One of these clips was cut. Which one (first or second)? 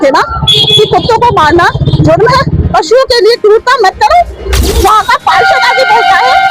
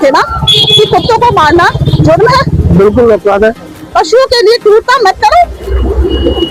first